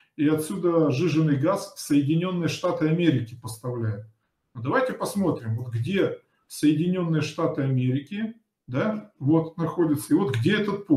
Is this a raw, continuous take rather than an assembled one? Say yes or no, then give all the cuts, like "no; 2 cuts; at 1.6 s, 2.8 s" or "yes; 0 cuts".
yes; 0 cuts